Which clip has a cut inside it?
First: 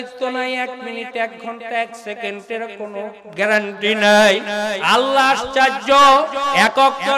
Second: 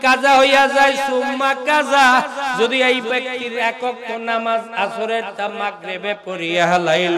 first; 1 cut; at 4.8 s

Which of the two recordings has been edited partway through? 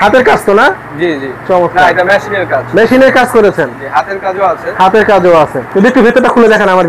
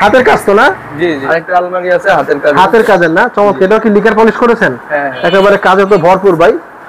second; 1 cut; at 1.2 s

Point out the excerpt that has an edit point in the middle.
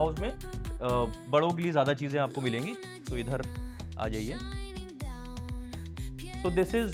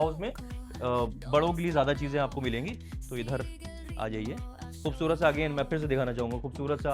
second; 1 cut; at 4.7 s

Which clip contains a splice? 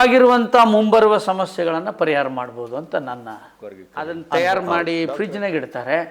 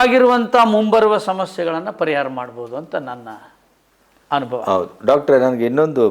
first; 1 cut; at 3.9 s

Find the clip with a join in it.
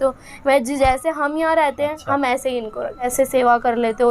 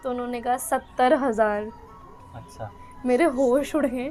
first; 1 cut; at 3.1 s

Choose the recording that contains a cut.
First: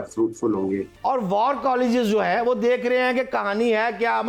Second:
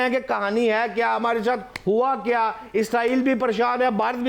first; 1 cut; at 0.9 s

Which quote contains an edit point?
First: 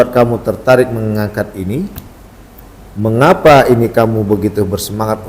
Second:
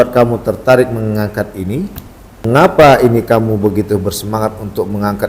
second; 1 cut; at 2.7 s

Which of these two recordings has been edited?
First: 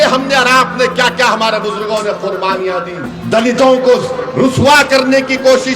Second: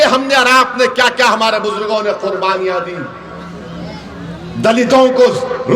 first; 1 cut; at 3.1 s

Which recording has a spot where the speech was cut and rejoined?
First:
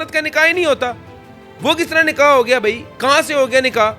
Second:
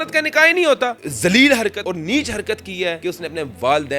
second; 3 cuts; at 1.0 s, 1.8 s, 3.0 s

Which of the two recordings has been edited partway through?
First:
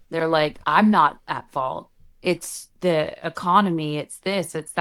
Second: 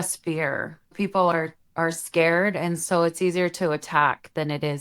second; 1 cut; at 0.9 s

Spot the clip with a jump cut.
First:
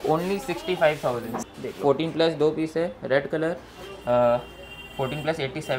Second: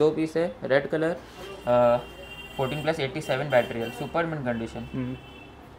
first; 1 cut; at 1.3 s

